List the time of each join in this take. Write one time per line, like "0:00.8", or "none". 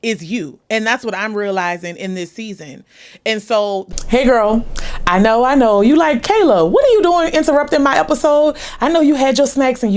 none